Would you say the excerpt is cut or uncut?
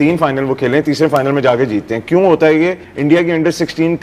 cut